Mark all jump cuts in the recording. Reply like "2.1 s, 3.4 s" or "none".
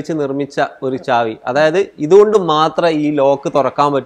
none